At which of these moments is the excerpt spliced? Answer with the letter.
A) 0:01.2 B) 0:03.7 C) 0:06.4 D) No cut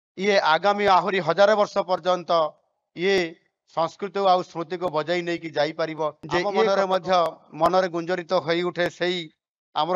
C